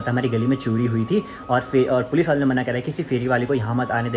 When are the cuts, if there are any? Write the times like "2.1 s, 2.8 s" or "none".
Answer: none